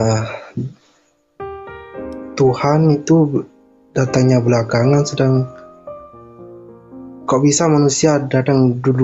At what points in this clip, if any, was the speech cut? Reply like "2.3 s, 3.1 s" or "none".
5.6 s, 7.2 s

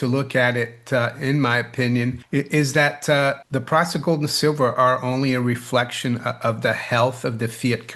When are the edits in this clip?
none

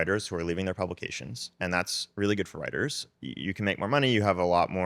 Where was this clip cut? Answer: 3.0 s

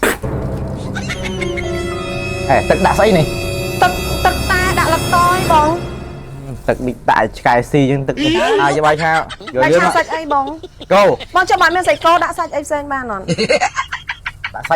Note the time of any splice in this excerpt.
8.6 s, 11.2 s

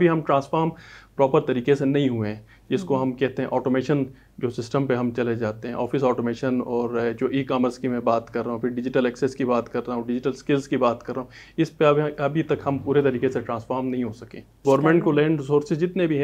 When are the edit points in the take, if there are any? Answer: 14.6 s

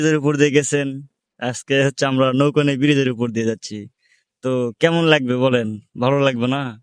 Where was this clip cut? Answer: none

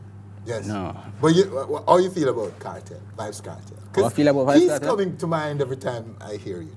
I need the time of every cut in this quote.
none

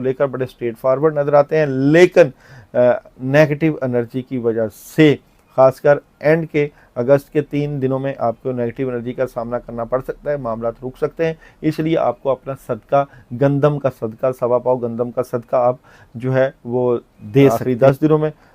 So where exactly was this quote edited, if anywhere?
17.5 s

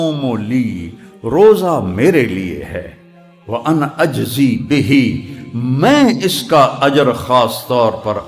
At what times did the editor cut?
none

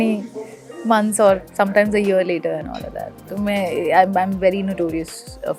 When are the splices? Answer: none

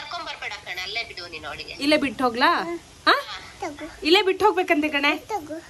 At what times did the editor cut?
none

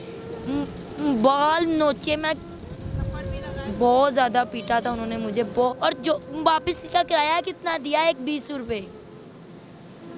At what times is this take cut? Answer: 5.5 s

